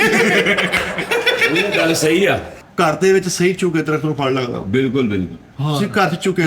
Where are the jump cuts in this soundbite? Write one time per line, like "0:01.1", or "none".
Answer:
0:02.6